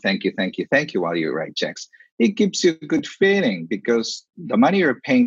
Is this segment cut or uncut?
cut